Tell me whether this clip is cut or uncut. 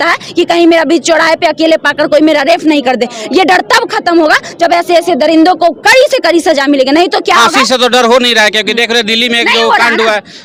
uncut